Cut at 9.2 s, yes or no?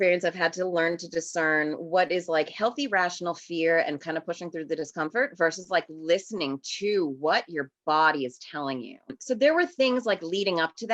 yes